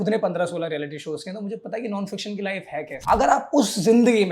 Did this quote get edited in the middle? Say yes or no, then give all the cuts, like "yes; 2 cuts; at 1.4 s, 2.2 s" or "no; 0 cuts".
yes; 1 cut; at 2.9 s